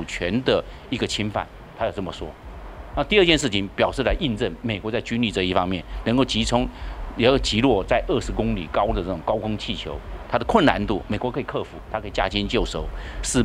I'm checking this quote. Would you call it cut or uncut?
cut